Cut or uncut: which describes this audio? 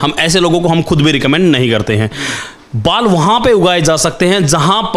uncut